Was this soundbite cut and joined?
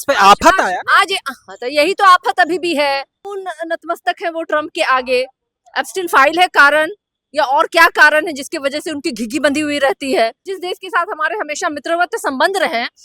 yes; 2 cuts; at 3.3 s, 10.4 s

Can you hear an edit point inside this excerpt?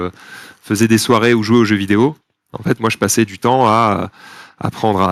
no; 0 cuts

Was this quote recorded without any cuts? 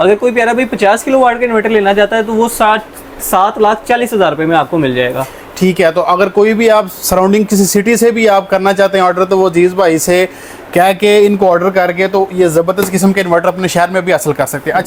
yes; 0 cuts

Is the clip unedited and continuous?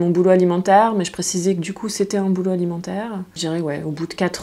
no; 1 cut; at 3.3 s

